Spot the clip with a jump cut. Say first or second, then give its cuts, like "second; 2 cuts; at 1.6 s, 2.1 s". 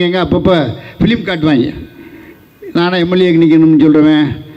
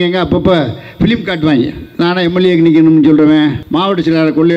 second; 2 cuts; at 1.8 s, 3.6 s